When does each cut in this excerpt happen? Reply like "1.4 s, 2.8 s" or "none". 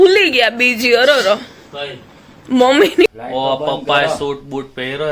3.1 s